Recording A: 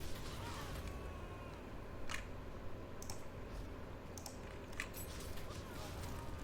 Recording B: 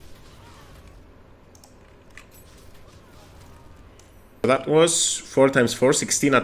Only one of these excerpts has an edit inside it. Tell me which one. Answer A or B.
B